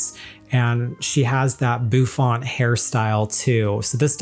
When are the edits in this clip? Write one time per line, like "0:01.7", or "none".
none